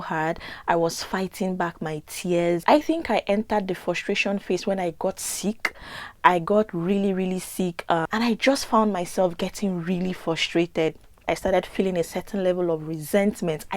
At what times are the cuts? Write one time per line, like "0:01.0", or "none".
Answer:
0:07.8
0:11.1